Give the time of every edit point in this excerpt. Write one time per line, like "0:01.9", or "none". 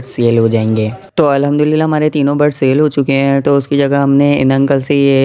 0:01.0